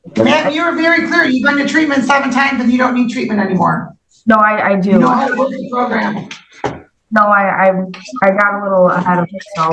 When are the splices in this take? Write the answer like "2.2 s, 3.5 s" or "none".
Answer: none